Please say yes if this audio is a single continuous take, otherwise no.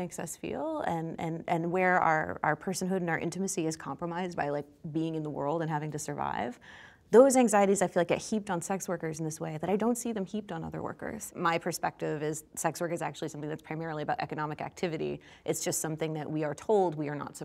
no